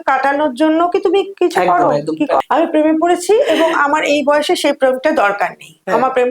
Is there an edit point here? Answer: yes; 1 cut; at 2.4 s

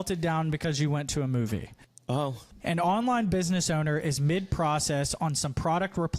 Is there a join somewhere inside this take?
yes; 1 cut; at 2.3 s

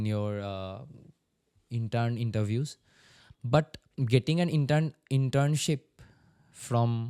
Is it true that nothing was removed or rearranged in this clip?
yes; 0 cuts

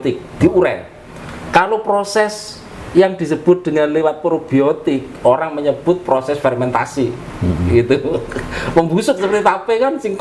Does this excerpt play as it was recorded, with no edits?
yes; 0 cuts

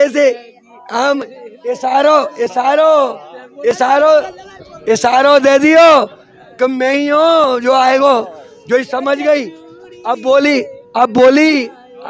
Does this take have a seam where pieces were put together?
no; 0 cuts

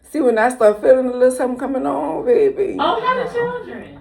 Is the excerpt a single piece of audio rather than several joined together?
yes; 0 cuts

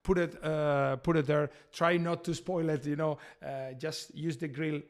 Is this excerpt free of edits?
yes; 0 cuts

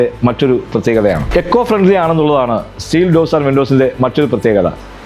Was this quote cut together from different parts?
no; 0 cuts

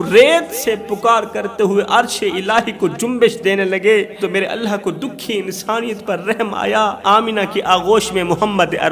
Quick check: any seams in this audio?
yes; 2 cuts; at 4.1 s, 7.0 s

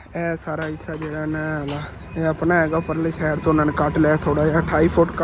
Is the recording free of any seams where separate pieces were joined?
yes; 0 cuts

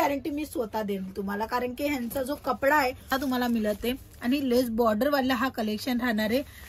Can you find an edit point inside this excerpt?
yes; 1 cut; at 3.1 s

